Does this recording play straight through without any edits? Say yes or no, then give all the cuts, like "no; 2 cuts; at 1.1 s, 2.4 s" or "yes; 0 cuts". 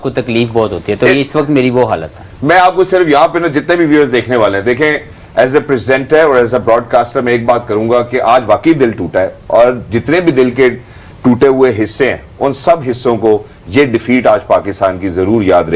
yes; 0 cuts